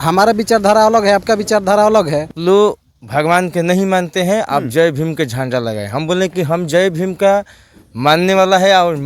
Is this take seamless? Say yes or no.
no